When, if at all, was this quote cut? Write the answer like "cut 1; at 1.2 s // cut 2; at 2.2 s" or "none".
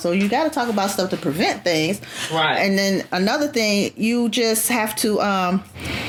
none